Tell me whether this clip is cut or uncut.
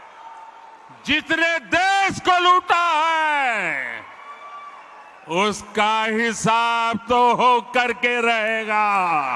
uncut